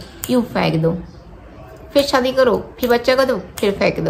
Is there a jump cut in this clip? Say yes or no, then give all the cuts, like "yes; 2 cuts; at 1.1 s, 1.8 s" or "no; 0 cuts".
no; 0 cuts